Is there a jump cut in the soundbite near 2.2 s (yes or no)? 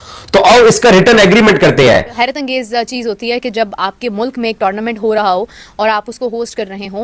yes